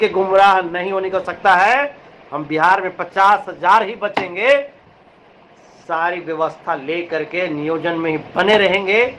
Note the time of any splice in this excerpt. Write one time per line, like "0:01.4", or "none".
none